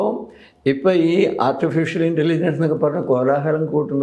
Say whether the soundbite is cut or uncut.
uncut